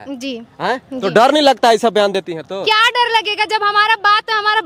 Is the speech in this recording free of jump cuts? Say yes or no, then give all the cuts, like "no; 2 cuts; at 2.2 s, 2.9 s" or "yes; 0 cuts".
yes; 0 cuts